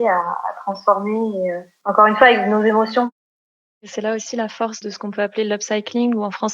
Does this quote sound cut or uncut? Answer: cut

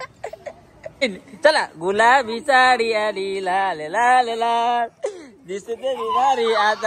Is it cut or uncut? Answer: cut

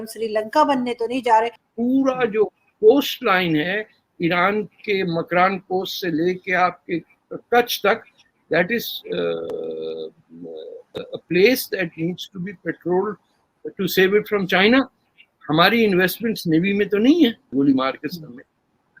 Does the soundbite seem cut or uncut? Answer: cut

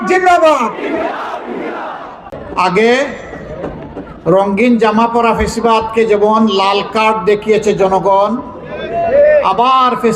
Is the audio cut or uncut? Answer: cut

